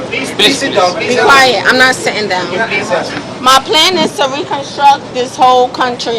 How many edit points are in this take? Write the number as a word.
one